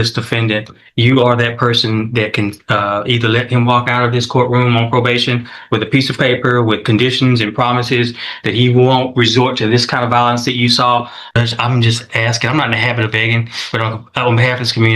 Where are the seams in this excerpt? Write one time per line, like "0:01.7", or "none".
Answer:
0:11.2